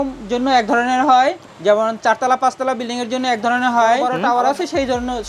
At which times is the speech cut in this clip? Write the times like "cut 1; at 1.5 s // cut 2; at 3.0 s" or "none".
cut 1; at 1.5 s // cut 2; at 4.1 s